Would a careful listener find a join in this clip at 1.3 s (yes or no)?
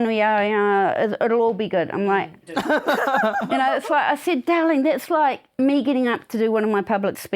no